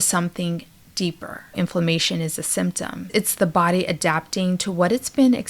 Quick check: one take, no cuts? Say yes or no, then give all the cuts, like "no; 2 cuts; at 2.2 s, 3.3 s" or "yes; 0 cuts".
no; 2 cuts; at 1.5 s, 3.1 s